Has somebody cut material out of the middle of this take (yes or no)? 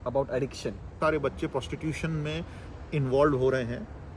yes